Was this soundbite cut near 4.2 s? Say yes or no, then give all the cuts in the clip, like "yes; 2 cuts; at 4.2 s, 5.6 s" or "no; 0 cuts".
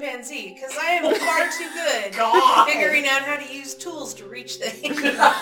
no; 0 cuts